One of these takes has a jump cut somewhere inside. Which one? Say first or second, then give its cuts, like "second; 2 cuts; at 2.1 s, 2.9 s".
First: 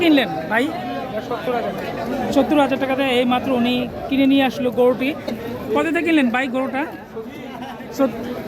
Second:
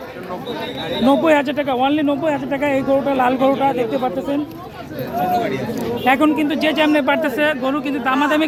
first; 1 cut; at 5.4 s